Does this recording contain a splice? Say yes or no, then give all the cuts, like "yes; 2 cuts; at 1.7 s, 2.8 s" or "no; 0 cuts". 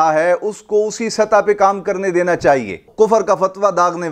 yes; 1 cut; at 2.9 s